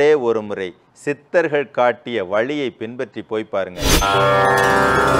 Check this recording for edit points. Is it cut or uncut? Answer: cut